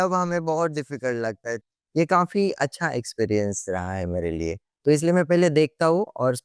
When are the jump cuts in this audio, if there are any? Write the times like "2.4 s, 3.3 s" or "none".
1.6 s